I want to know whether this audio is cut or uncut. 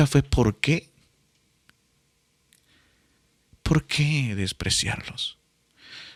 uncut